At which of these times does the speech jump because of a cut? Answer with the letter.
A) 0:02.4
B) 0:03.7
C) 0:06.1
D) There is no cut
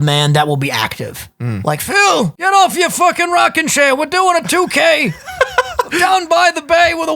A